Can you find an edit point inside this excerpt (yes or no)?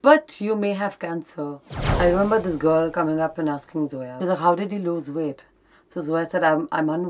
yes